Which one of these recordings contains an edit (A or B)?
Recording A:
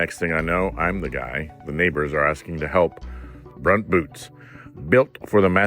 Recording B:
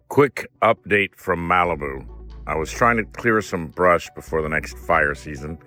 A